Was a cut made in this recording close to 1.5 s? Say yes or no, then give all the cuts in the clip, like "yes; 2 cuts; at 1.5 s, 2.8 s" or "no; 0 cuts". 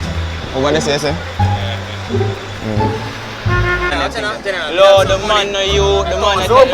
no; 1 cut; at 3.9 s